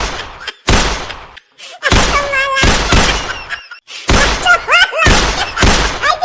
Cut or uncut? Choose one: uncut